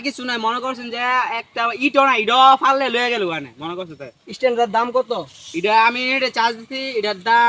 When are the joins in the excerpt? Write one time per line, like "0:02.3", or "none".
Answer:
none